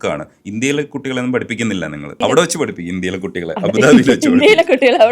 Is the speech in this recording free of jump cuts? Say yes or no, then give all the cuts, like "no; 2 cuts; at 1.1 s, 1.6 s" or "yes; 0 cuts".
no; 1 cut; at 2.2 s